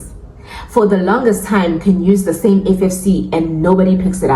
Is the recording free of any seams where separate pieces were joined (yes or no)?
yes